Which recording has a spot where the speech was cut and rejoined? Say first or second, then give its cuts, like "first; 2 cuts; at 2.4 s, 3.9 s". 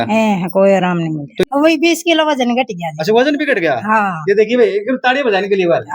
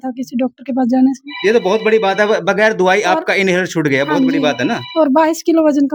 first; 1 cut; at 1.4 s